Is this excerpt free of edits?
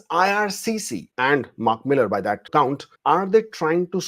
no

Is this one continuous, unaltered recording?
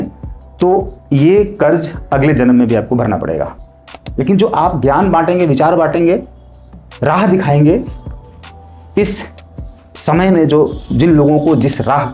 no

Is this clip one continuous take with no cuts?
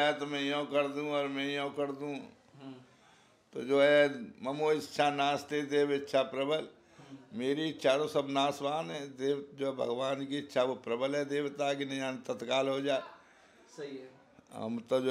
yes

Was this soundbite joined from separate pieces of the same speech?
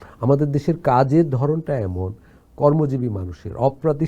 no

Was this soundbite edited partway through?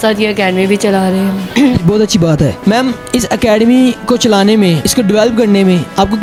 no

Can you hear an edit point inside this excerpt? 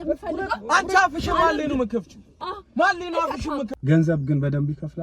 yes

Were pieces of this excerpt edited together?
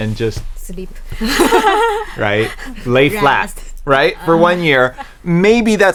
no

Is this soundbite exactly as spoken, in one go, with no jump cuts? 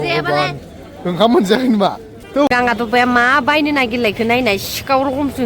no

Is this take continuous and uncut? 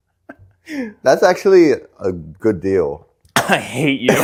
yes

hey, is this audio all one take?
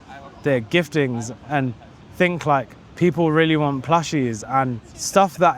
yes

